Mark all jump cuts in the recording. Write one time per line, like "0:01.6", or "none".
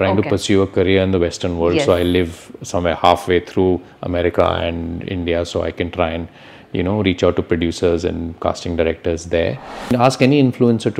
0:09.9